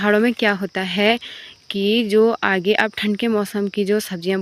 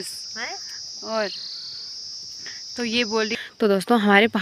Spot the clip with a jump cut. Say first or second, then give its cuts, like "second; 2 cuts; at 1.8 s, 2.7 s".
second; 1 cut; at 3.4 s